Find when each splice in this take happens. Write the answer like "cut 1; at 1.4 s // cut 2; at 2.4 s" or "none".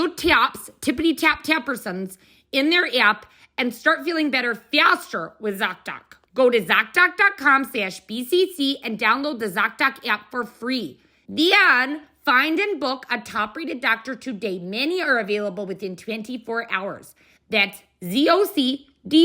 none